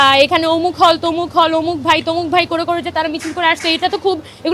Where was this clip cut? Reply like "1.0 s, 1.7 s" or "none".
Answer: none